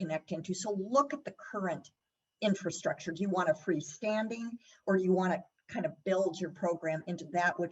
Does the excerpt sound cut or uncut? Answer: uncut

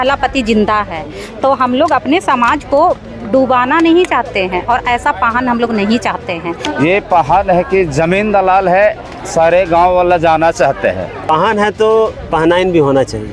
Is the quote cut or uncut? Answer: cut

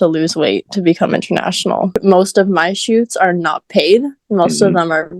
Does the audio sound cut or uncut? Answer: cut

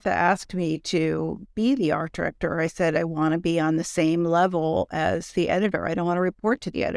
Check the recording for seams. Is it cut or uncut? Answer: uncut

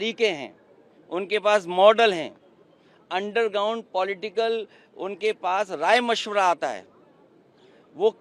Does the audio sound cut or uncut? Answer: uncut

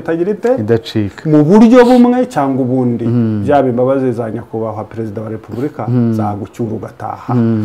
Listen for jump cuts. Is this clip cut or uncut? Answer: uncut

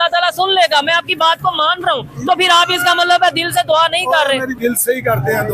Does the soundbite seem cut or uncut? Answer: cut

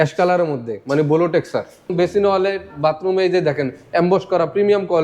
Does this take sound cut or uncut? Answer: cut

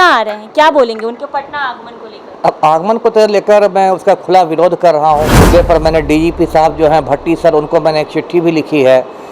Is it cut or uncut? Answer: cut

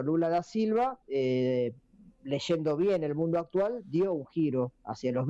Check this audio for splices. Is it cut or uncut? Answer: uncut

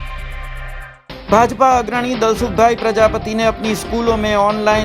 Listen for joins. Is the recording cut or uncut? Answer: cut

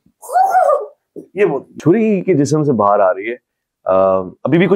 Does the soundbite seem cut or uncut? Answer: cut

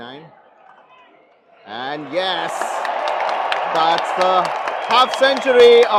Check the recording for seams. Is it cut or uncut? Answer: uncut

